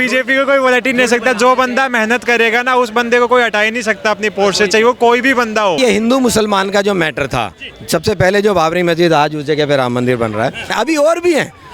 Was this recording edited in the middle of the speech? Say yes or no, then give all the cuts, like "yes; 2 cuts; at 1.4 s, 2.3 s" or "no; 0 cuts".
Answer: yes; 2 cuts; at 5.8 s, 10.7 s